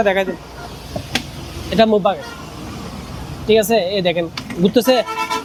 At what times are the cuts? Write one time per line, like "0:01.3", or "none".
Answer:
none